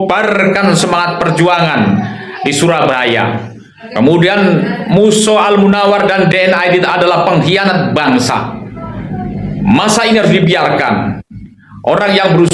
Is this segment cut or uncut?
uncut